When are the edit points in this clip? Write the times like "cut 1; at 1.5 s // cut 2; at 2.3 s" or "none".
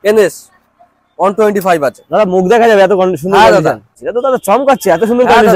cut 1; at 4.0 s